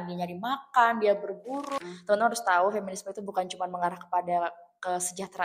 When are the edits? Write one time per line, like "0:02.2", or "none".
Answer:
0:01.8